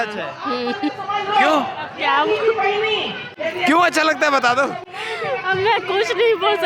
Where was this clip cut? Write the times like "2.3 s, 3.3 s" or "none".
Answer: none